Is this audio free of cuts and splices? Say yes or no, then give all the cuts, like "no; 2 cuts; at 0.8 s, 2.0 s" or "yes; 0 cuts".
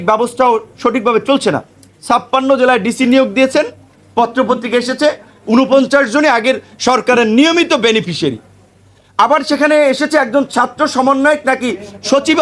yes; 0 cuts